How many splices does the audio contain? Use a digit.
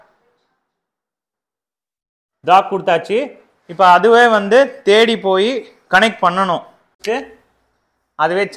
1